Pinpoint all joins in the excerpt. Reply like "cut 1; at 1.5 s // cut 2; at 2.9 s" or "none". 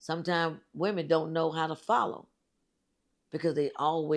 none

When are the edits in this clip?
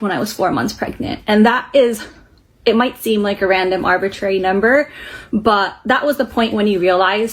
none

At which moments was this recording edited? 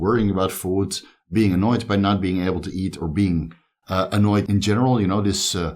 cut 1; at 4.5 s

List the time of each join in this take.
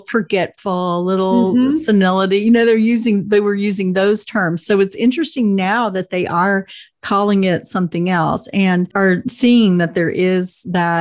cut 1; at 8.9 s

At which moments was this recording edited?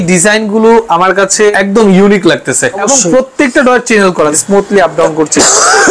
cut 1; at 1.5 s // cut 2; at 2.8 s // cut 3; at 4.4 s

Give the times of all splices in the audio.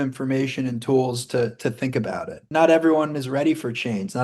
cut 1; at 2.4 s

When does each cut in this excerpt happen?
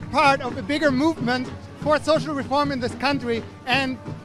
none

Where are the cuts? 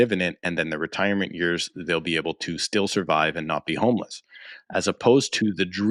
none

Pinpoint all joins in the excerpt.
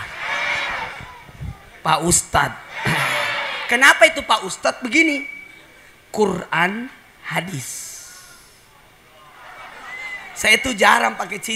cut 1; at 9.6 s

